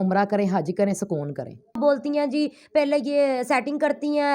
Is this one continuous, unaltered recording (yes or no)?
no